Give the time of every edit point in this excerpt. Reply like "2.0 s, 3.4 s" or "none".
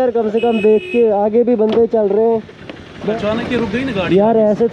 3.1 s